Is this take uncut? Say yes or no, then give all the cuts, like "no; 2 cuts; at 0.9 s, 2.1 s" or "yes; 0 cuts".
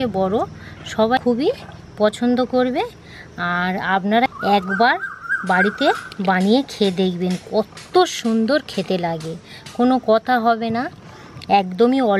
no; 2 cuts; at 1.2 s, 4.3 s